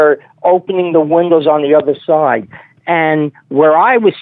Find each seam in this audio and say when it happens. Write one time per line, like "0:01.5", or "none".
none